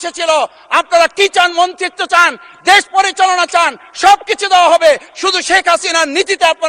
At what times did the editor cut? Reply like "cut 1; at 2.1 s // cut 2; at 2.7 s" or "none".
none